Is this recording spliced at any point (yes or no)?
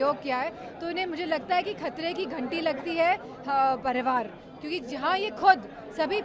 no